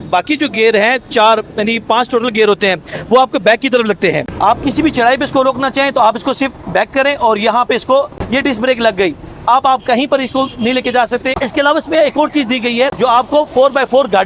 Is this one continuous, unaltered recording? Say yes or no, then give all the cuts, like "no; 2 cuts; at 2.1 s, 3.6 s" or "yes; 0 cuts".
no; 2 cuts; at 4.3 s, 11.4 s